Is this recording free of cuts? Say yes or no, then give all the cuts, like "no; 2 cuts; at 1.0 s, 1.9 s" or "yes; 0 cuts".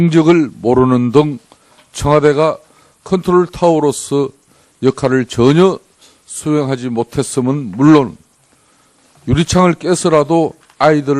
no; 1 cut; at 7.3 s